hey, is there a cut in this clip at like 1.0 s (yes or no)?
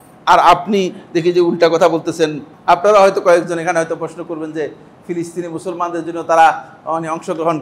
no